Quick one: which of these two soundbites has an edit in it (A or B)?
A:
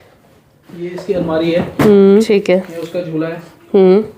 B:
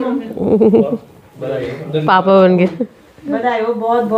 A